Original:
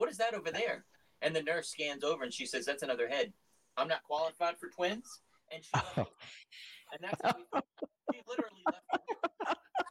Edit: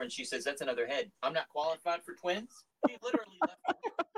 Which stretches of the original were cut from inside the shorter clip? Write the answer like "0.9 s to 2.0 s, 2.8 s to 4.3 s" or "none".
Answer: 3.3 s to 3.7 s, 5.2 s to 7.9 s